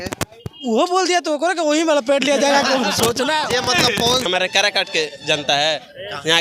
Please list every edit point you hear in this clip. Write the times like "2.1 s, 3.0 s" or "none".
4.3 s

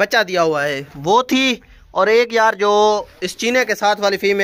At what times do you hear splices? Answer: none

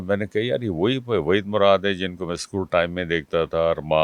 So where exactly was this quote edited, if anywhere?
none

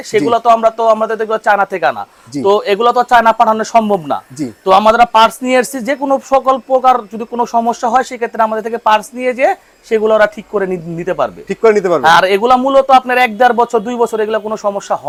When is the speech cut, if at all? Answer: none

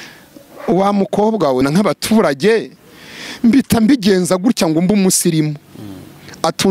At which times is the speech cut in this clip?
1.6 s

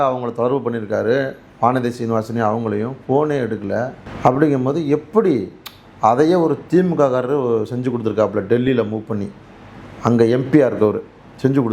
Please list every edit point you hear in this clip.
4.0 s

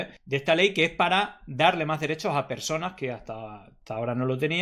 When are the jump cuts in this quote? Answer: none

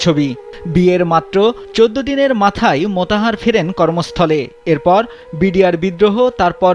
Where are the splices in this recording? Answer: none

